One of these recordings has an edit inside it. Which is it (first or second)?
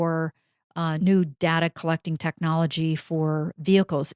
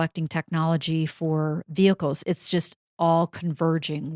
first